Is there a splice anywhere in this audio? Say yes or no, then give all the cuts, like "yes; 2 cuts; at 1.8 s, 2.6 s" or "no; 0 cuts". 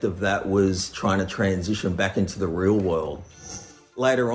yes; 1 cut; at 3.3 s